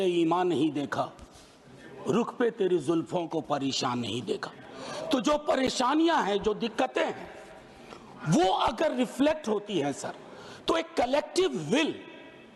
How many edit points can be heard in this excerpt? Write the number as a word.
zero